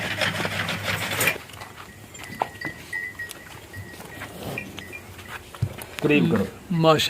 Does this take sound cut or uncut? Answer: cut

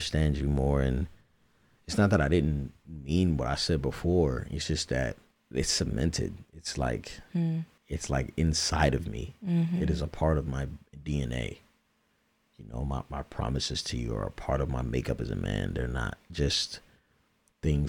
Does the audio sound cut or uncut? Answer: cut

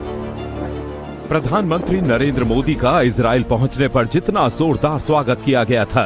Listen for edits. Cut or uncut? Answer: cut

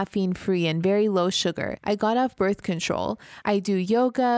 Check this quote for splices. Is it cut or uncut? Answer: cut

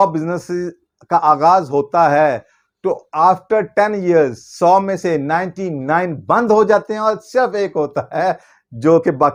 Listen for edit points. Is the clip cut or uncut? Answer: uncut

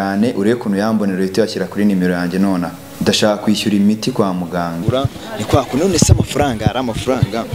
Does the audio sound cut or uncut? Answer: cut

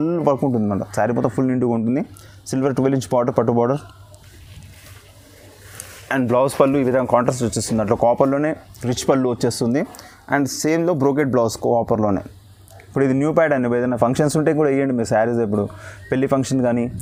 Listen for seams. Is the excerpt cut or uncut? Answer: uncut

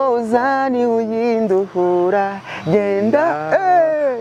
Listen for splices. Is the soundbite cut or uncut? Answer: uncut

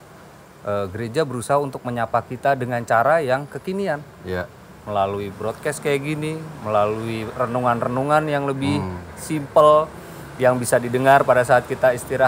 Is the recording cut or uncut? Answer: uncut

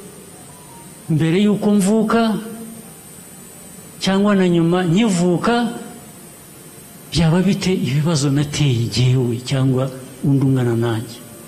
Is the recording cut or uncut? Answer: uncut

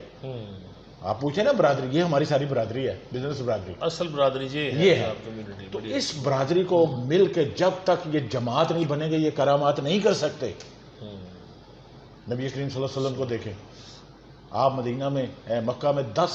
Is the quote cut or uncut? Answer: uncut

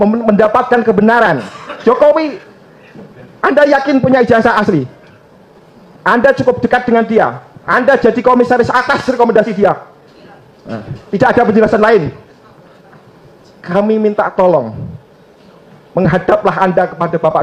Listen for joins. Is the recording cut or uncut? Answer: uncut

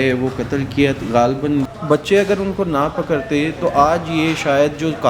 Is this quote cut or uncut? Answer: cut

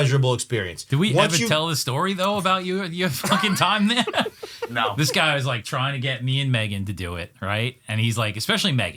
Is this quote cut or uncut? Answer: uncut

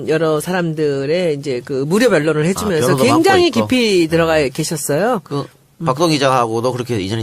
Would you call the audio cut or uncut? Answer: cut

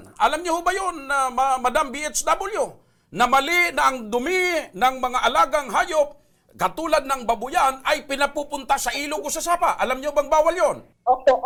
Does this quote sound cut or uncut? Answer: uncut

